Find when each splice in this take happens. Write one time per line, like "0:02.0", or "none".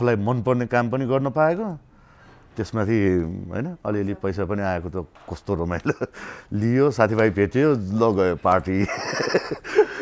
none

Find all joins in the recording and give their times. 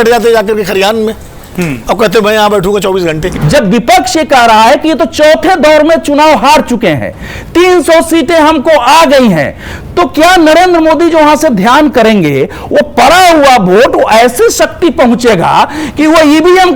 0:03.3

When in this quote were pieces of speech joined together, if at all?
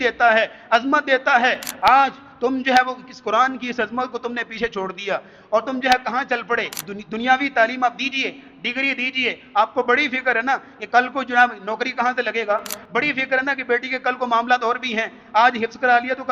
0:06.9

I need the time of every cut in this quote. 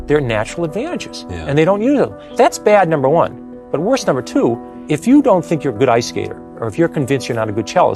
0:02.2
0:04.7

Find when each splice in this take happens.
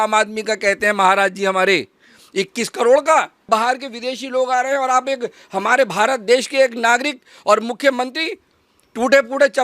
0:03.5

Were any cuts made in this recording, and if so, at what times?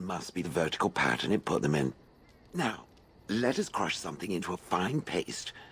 0:02.1

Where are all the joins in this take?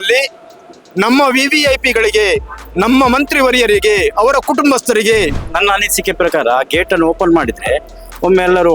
0:05.5

